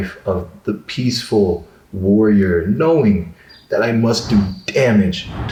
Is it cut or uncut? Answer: uncut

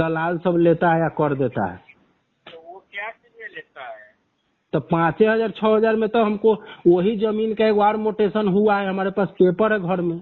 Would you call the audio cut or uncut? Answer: uncut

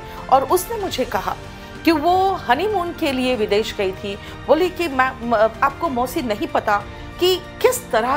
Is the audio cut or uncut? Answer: uncut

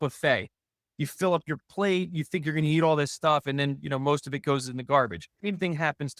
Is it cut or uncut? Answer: uncut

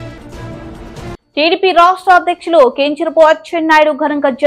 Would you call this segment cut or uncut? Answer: uncut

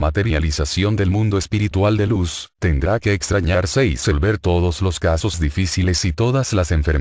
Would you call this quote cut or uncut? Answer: uncut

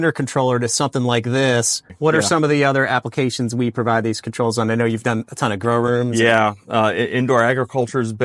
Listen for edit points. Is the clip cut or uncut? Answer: cut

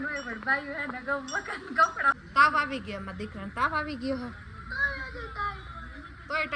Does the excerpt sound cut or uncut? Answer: cut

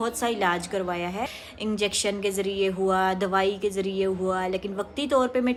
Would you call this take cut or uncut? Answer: uncut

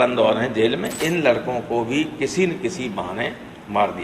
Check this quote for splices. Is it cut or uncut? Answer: cut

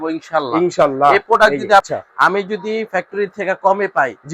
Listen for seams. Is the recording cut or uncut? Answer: cut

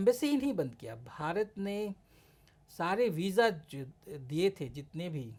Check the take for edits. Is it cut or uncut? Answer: uncut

